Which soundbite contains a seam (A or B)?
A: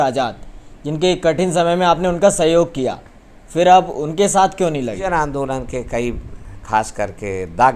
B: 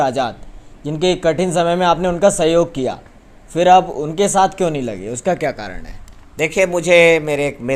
A